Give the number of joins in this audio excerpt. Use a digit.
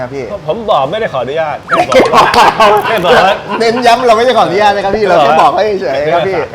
0